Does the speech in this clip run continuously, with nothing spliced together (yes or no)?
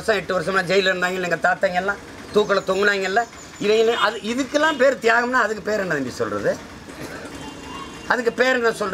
yes